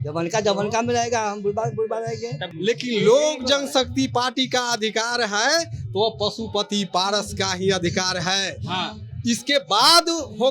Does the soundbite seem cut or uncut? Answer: cut